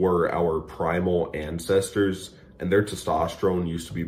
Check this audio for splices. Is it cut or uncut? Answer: uncut